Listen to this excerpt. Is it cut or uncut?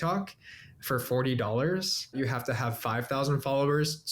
cut